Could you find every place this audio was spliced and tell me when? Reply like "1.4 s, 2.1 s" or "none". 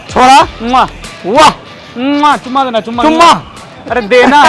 none